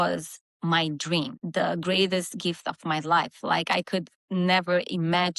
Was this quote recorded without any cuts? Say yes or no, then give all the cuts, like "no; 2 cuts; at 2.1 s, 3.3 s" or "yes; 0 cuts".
no; 1 cut; at 1.4 s